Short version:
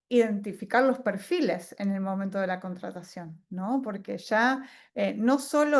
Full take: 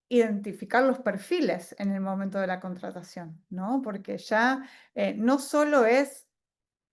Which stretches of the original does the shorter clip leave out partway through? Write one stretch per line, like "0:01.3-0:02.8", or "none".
none